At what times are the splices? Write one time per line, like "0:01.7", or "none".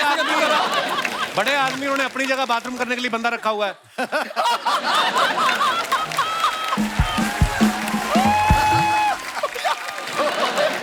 none

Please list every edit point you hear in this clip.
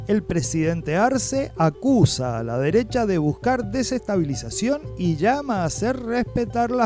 none

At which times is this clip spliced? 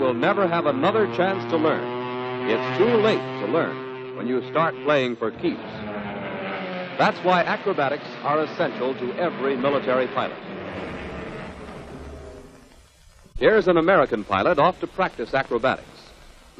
0:09.1

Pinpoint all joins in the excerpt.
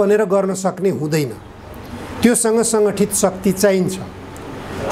none

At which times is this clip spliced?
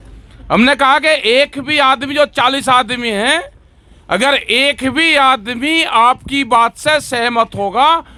none

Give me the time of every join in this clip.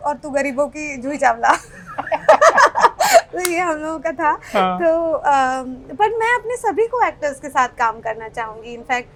none

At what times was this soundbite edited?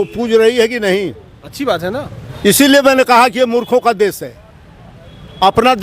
0:02.2

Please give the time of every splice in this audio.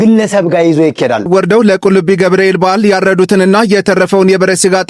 0:01.3

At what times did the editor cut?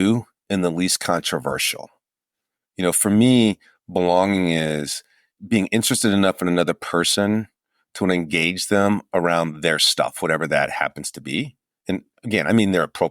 0:05.3
0:12.1

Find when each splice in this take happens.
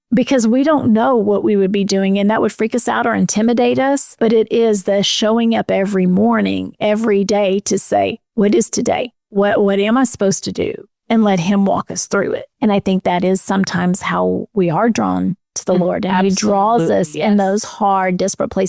0:04.1
0:09.2
0:10.9
0:12.5

